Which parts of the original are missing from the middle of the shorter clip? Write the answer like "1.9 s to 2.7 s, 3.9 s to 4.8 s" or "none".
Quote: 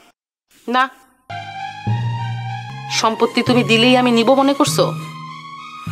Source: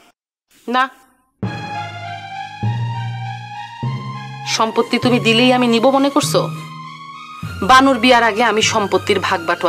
1.2 s to 2.0 s, 3.5 s to 4.3 s